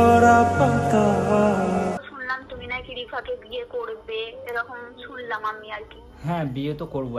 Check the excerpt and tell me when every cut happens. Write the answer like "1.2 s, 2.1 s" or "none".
2.0 s